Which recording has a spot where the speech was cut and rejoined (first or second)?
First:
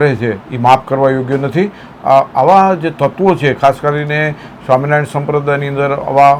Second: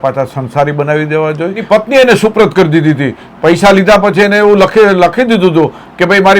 second